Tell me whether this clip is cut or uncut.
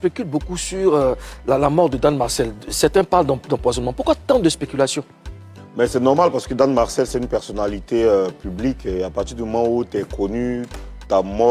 uncut